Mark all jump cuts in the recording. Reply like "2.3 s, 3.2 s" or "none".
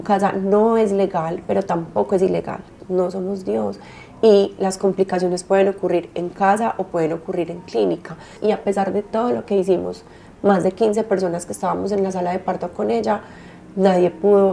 2.8 s, 8.4 s